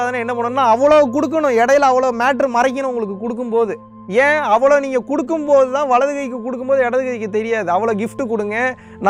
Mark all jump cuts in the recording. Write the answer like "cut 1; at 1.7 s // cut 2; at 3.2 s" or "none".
none